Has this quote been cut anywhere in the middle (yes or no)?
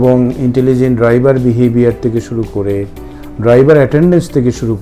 no